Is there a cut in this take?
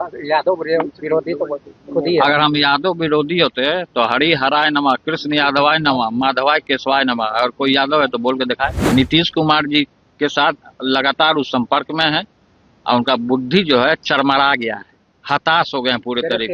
yes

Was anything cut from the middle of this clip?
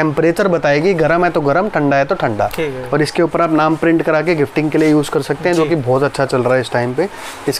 no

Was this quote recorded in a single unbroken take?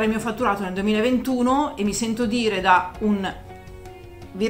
yes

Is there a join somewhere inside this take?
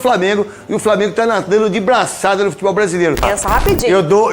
yes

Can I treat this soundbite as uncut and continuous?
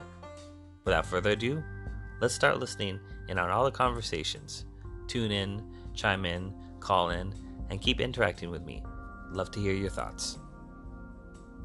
yes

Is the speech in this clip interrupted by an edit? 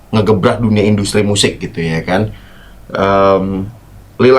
no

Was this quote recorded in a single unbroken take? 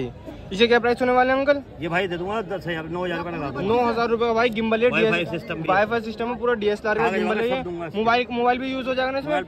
yes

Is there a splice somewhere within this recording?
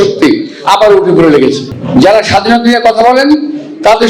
yes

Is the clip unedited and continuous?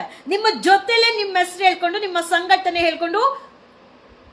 yes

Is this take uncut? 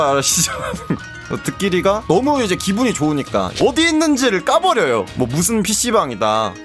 no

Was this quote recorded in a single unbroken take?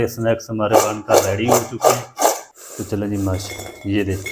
no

